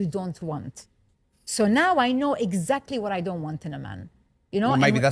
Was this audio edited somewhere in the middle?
no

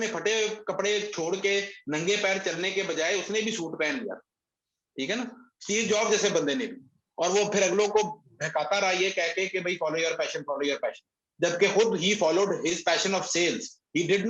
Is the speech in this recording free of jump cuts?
yes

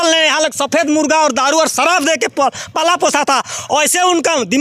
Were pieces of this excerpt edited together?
no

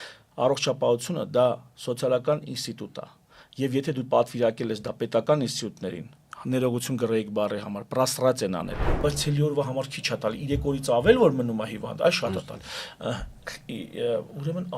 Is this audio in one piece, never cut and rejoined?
no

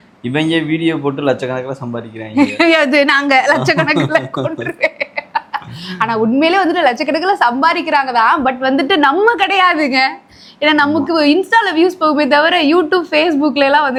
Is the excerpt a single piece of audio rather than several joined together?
yes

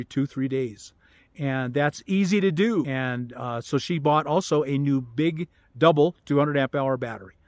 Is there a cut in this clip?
yes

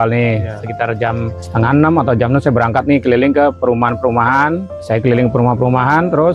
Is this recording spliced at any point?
yes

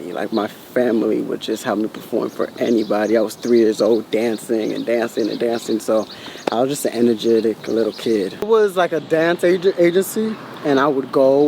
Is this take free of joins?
no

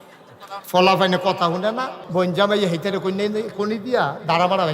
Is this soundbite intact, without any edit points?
no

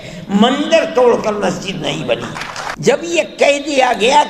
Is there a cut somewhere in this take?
yes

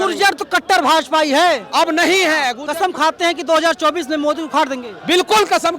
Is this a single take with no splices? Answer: no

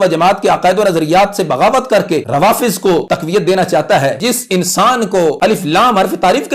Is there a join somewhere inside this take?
yes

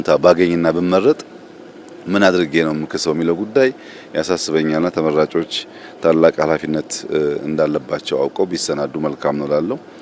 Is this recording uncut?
yes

